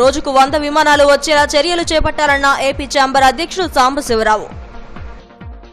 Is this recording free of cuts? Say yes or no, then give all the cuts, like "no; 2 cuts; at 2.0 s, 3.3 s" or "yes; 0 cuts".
yes; 0 cuts